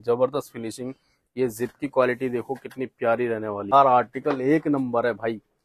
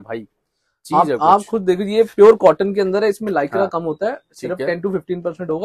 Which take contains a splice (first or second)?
first